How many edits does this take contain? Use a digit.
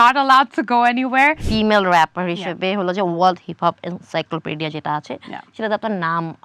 1